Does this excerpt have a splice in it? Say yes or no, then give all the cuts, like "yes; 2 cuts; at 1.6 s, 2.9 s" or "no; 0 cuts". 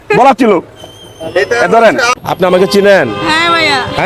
yes; 1 cut; at 2.2 s